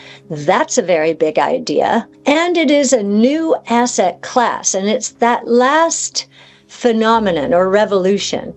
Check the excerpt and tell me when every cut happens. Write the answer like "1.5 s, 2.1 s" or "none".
2.1 s